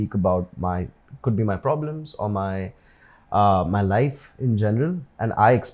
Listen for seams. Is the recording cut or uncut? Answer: cut